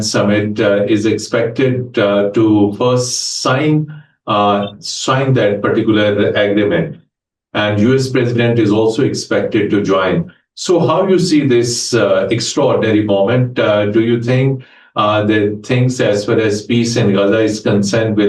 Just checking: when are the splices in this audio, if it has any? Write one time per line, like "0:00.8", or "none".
none